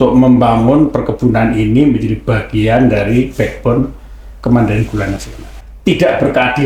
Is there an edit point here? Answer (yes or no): yes